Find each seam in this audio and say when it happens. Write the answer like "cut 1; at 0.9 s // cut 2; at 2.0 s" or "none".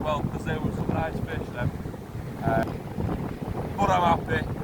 cut 1; at 2.6 s

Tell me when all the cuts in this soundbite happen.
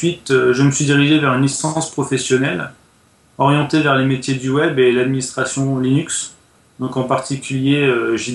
none

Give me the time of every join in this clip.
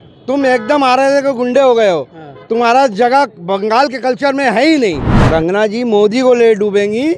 cut 1; at 5.1 s

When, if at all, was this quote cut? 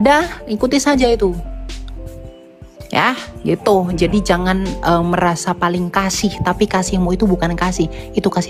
none

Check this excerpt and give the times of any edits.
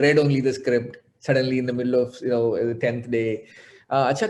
none

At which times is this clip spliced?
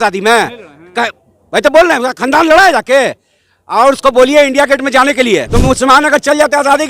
cut 1; at 5.5 s

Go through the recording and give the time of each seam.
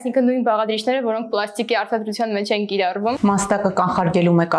cut 1; at 3.2 s

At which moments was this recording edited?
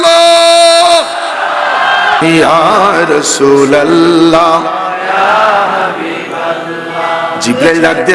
cut 1; at 2.2 s

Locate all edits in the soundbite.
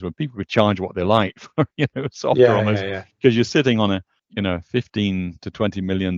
cut 1; at 4.2 s

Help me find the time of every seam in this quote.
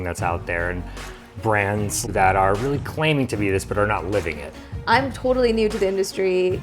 cut 1; at 2.0 s // cut 2; at 4.6 s

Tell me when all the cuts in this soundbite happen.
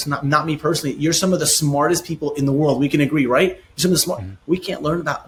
none

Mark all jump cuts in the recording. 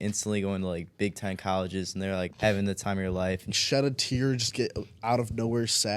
cut 1; at 3.4 s

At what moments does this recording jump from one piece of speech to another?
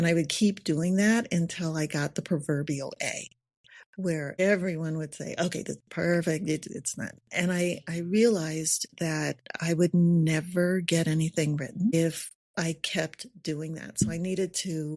none

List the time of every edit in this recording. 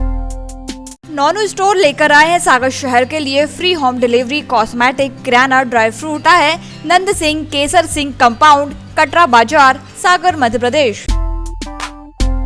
cut 1; at 1.0 s // cut 2; at 6.2 s // cut 3; at 11.1 s

